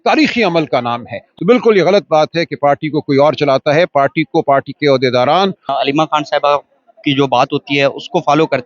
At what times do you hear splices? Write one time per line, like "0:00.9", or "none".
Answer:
0:01.3
0:05.6